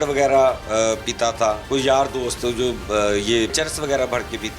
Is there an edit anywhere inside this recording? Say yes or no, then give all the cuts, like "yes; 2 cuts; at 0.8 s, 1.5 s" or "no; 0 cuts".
yes; 2 cuts; at 1.6 s, 3.5 s